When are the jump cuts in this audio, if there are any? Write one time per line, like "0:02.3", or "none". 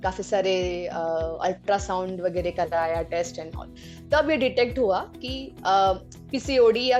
none